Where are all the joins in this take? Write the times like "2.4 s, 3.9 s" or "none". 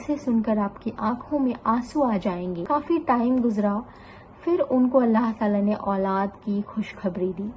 2.6 s